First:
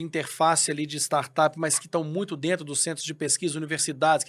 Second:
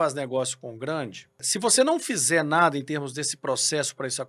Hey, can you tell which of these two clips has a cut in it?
second; 1 cut; at 1.5 s

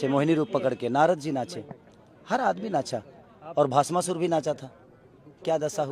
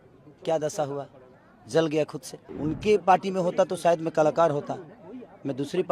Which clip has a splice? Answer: second; 1 cut; at 2.4 s

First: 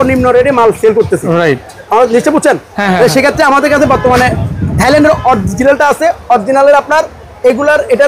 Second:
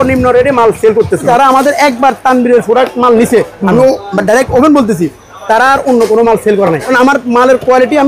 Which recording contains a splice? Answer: second; 3 cuts; at 1.2 s, 3.5 s, 6.9 s

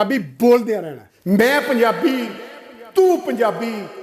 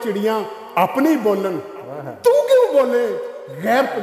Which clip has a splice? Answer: first; 1 cut; at 1.1 s

